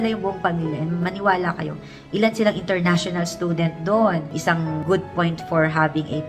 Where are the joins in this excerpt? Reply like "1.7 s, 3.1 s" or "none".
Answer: 4.3 s